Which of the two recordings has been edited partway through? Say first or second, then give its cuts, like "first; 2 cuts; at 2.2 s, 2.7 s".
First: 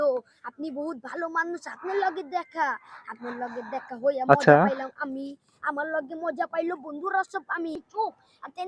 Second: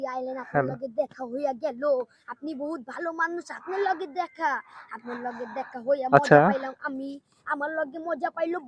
first; 1 cut; at 7.8 s